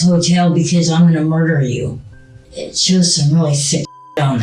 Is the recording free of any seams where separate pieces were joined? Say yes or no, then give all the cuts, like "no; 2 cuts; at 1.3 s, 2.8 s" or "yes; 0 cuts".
no; 1 cut; at 2.5 s